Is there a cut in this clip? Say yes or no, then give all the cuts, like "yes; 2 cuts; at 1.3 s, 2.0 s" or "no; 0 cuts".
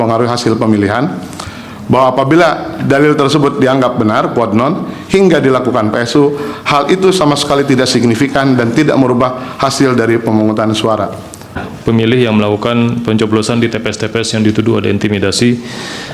yes; 1 cut; at 11.7 s